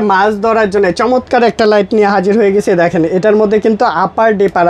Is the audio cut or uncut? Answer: uncut